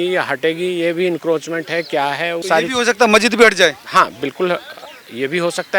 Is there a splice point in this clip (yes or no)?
yes